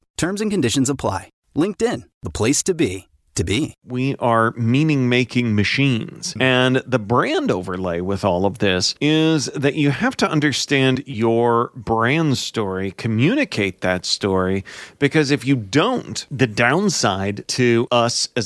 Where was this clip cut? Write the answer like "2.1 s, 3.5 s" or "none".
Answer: 3.8 s, 6.2 s, 8.9 s, 16.2 s, 17.7 s